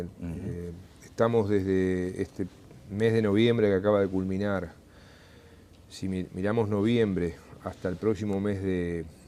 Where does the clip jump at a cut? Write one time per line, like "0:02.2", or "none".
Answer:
0:01.4

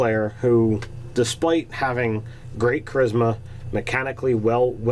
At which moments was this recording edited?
0:03.4

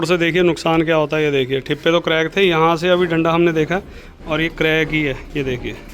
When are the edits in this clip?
none

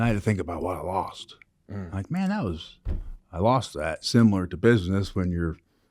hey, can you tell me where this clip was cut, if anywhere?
none

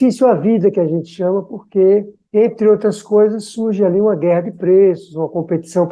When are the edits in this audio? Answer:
none

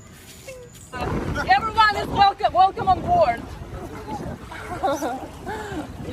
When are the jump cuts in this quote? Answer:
0:01.0

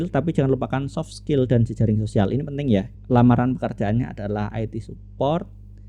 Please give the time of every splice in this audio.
0:03.0

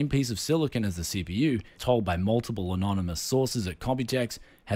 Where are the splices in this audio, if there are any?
0:01.7

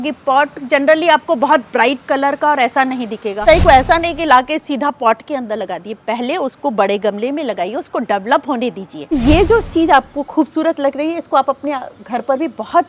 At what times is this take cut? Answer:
0:03.4
0:09.1

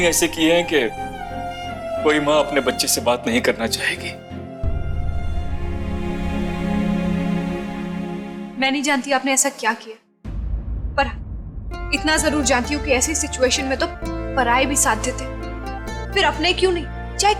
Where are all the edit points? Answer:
none

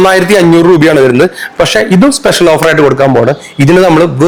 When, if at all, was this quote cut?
none

